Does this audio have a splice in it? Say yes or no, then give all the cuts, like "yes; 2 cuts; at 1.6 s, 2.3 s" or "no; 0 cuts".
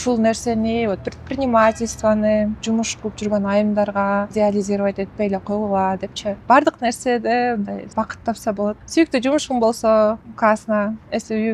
yes; 6 cuts; at 2.6 s, 4.3 s, 6.4 s, 7.8 s, 8.8 s, 10.3 s